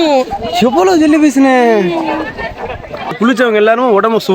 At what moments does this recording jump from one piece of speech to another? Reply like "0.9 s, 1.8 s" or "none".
3.2 s